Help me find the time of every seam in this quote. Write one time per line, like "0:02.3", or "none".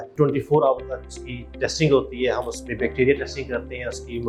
none